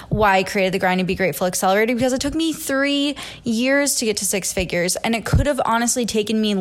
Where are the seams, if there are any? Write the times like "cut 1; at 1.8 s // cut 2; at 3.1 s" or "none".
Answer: none